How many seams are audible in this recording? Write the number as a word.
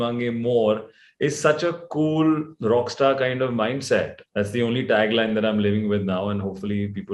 one